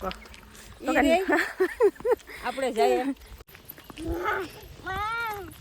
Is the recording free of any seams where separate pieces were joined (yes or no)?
no